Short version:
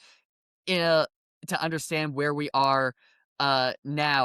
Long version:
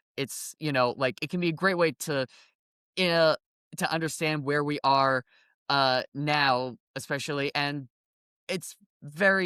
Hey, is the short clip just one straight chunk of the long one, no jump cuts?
yes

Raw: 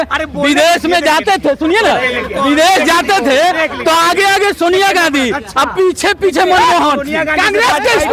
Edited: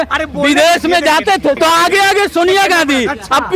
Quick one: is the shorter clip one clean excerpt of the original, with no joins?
no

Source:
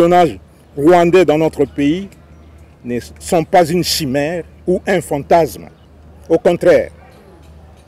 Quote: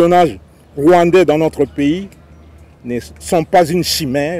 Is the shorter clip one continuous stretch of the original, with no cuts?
yes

